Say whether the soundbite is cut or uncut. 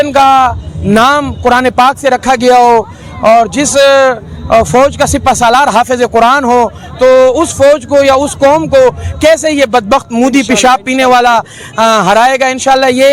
uncut